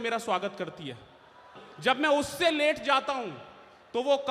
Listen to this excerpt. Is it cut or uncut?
cut